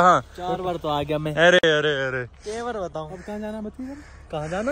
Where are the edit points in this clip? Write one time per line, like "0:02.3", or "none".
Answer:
none